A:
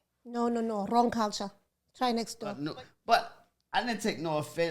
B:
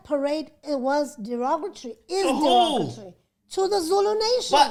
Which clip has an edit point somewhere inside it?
A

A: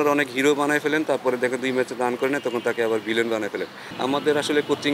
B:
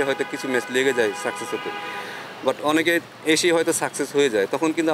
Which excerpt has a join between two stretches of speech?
A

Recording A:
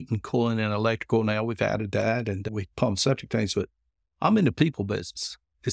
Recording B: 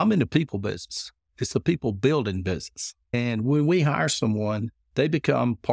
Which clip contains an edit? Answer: B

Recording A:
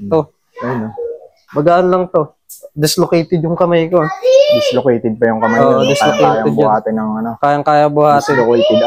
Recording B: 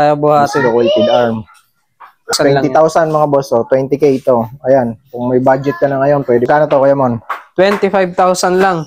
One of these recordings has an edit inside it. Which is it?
B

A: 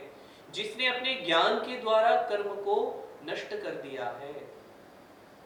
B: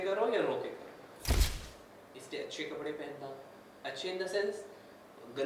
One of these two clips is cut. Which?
B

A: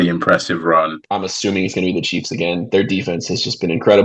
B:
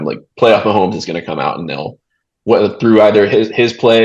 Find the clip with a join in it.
A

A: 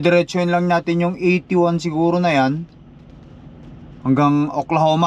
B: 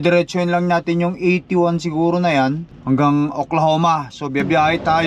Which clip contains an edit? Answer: B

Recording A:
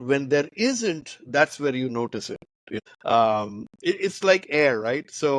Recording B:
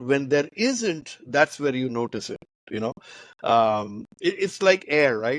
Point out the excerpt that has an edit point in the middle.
A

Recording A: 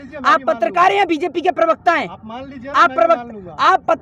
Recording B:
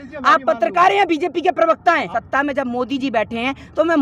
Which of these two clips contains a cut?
B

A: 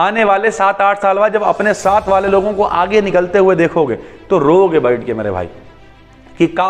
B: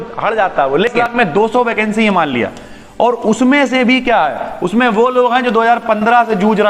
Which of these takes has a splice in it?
B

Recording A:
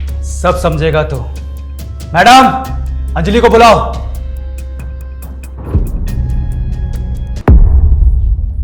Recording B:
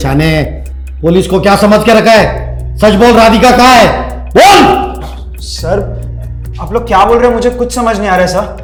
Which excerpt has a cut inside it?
A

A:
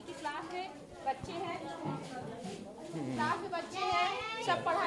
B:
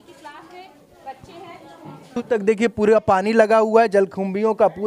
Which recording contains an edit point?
B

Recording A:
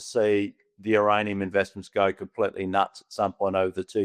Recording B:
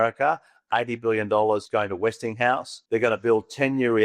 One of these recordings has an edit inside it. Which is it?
B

